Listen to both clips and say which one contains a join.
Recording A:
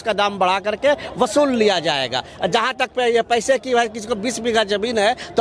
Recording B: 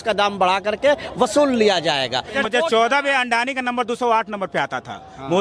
B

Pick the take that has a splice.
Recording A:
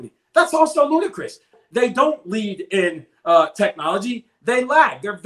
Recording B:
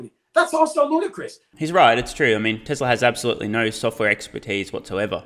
A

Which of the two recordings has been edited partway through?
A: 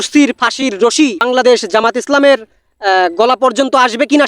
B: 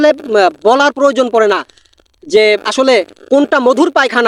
A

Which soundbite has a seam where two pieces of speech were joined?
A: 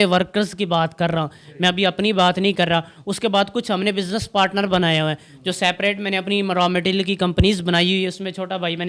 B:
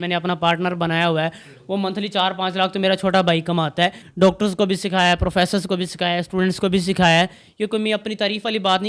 B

